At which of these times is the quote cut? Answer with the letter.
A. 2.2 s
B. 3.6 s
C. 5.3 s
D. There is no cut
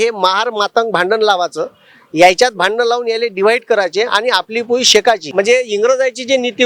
C